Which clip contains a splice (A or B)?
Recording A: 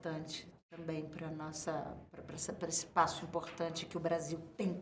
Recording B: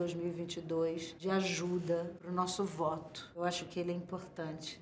B